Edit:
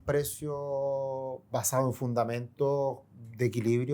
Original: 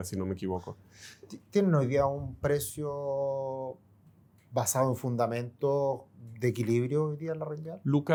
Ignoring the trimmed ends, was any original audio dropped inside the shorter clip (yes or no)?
yes